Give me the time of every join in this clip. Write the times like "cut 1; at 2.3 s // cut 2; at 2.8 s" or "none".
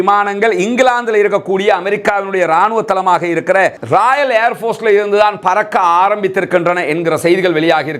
none